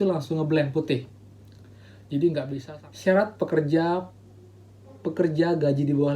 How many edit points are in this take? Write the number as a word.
one